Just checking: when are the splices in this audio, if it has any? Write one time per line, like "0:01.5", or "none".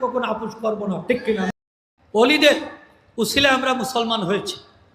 0:01.5